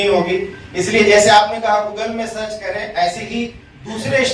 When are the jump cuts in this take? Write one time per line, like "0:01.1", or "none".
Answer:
none